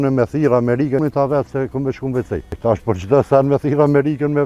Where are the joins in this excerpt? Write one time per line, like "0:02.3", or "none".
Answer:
0:01.0
0:02.5